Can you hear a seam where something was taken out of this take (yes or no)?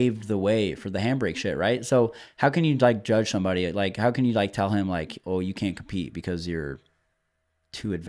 no